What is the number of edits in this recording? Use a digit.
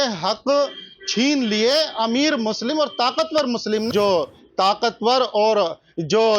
1